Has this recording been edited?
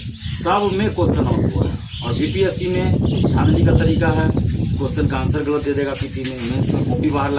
no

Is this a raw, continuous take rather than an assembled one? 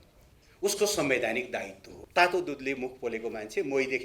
no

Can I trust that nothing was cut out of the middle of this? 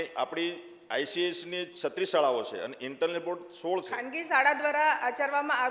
no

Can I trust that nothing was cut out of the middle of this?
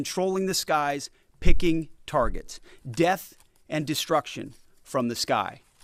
yes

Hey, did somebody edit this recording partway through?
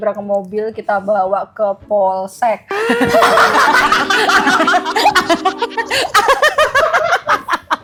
no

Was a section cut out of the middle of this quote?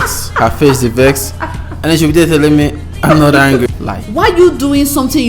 yes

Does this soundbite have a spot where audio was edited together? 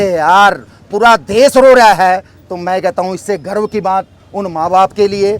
no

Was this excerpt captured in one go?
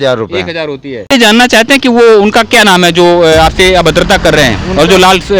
no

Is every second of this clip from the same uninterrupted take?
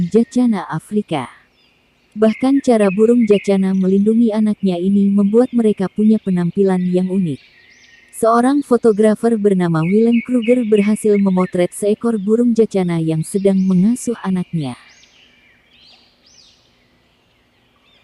no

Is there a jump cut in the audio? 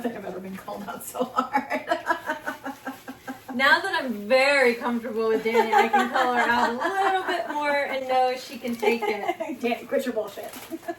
no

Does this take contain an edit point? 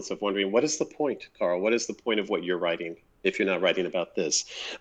yes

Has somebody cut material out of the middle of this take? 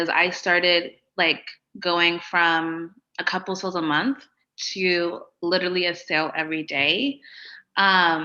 no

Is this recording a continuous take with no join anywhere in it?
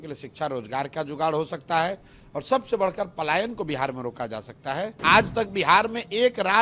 no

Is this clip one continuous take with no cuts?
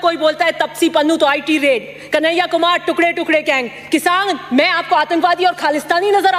yes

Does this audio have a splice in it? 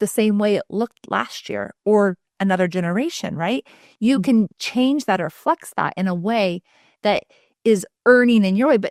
no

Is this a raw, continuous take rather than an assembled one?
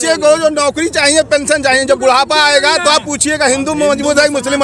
yes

